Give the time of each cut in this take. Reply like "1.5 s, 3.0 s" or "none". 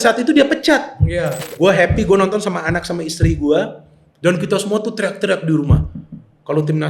1.4 s